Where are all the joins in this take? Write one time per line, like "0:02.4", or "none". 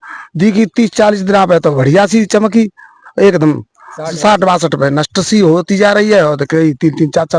none